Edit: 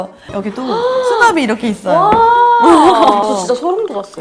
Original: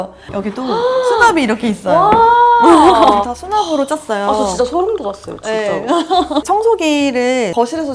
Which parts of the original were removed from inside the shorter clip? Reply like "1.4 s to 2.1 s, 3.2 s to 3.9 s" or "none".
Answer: 3.2 s to 4.3 s